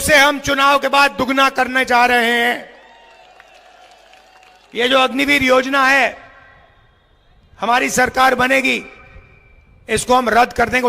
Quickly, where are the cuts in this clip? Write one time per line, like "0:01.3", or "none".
0:04.7